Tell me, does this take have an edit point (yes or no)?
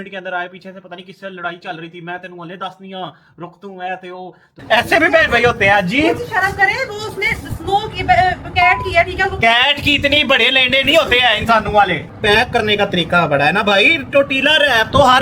yes